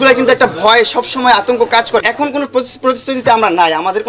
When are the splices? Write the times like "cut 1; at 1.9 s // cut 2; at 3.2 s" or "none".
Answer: cut 1; at 2.0 s